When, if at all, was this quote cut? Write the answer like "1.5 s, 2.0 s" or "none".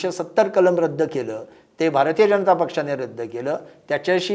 none